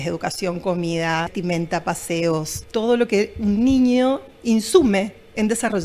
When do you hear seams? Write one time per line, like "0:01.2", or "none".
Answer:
0:01.3
0:02.6

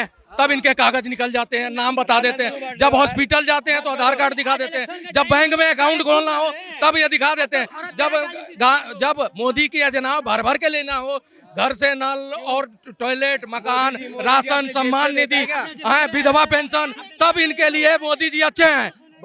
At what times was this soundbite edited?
none

